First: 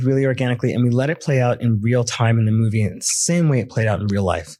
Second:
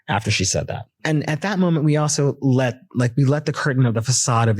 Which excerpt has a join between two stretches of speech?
second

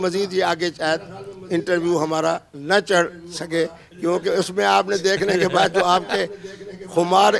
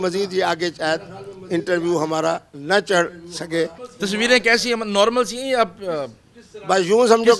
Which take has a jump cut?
second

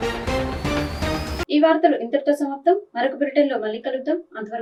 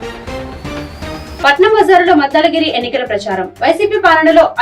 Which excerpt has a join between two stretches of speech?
second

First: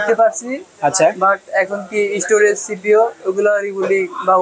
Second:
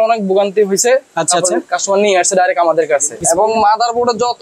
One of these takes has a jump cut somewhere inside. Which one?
second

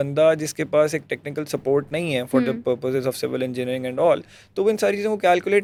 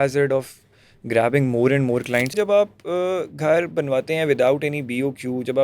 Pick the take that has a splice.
second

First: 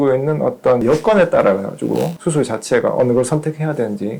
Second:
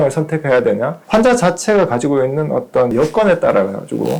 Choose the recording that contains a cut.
second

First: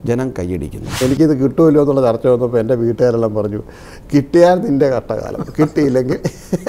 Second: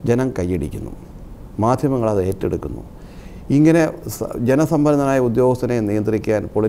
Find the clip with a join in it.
first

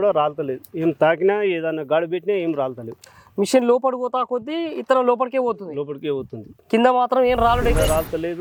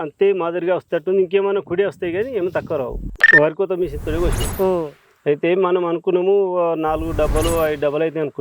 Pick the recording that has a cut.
second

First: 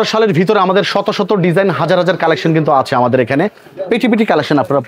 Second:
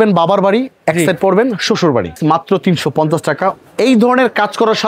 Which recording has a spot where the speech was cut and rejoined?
second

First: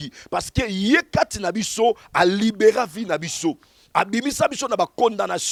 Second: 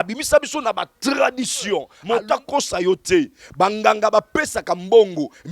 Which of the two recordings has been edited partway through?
second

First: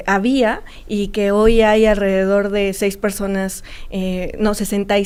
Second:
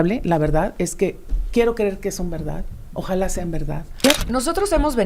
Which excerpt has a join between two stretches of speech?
second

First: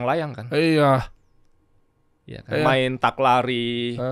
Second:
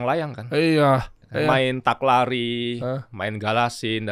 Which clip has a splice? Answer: second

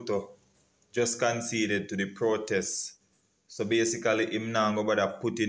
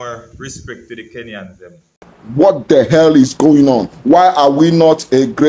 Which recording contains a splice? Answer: second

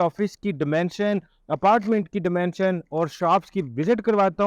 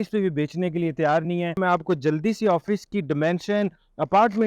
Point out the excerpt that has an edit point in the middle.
second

